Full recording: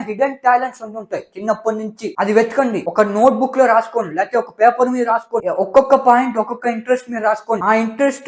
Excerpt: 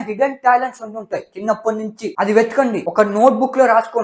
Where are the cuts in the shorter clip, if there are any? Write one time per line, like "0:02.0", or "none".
none